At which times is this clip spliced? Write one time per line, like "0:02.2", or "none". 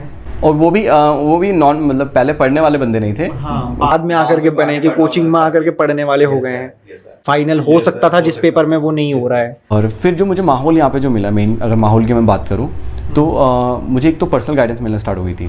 0:07.2
0:09.7